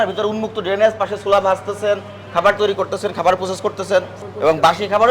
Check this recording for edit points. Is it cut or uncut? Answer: uncut